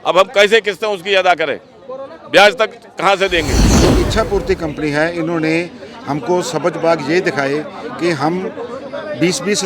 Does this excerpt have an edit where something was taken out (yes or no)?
yes